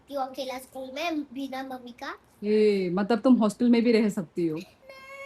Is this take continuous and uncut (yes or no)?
yes